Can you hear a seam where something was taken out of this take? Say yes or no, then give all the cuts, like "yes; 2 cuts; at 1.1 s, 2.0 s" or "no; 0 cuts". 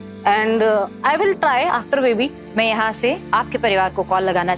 yes; 2 cuts; at 2.4 s, 3.2 s